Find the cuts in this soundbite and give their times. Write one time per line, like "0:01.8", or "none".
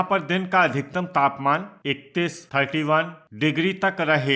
0:01.8
0:03.2